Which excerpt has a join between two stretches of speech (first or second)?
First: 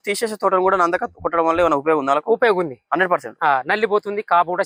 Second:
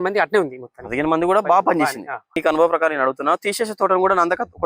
second